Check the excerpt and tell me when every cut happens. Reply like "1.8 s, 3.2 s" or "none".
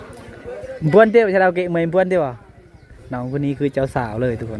none